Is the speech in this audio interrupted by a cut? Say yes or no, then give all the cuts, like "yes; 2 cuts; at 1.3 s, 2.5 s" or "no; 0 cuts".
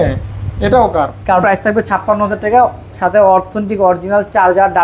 yes; 1 cut; at 1.4 s